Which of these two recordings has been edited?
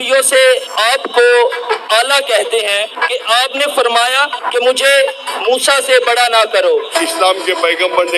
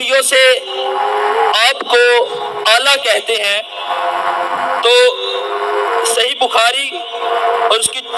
first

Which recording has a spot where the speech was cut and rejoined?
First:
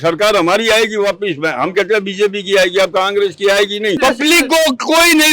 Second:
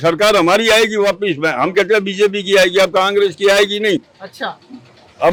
first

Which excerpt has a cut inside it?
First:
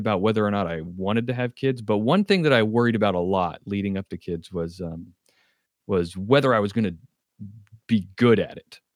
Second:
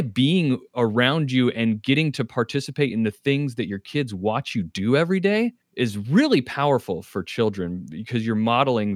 second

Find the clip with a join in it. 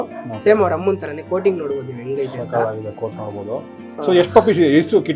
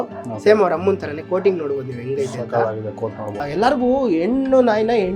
second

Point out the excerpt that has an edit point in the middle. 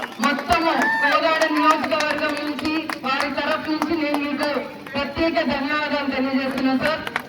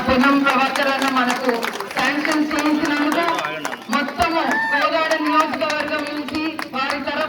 first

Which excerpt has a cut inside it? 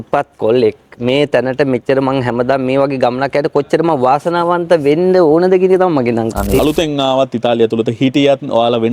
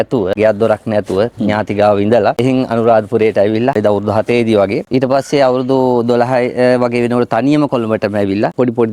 first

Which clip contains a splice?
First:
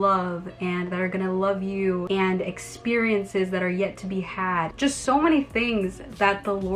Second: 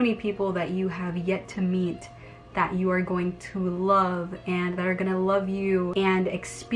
first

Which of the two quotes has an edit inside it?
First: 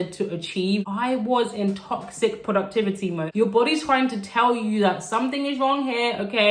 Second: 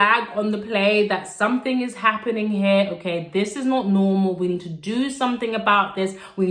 first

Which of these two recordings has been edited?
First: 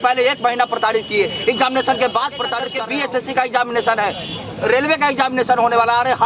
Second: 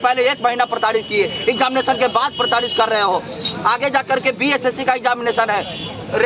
first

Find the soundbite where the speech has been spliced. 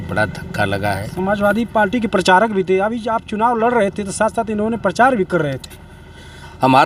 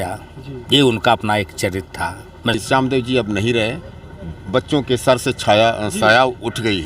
second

